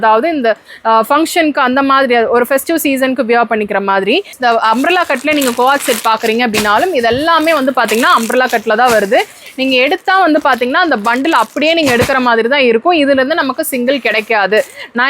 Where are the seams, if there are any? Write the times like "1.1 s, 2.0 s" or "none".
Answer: 4.3 s